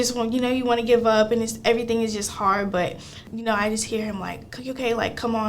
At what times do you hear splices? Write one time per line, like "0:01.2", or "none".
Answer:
0:03.3